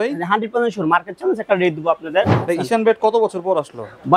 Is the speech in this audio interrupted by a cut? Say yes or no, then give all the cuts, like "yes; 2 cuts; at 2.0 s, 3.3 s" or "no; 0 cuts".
yes; 1 cut; at 2.4 s